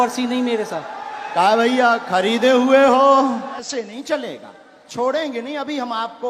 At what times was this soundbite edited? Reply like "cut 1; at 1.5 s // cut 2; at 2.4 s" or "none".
cut 1; at 3.6 s